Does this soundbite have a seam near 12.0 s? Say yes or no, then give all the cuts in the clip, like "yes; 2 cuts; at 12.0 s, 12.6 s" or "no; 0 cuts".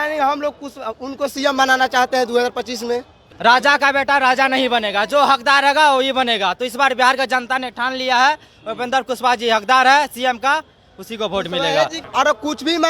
yes; 2 cuts; at 3.2 s, 12.0 s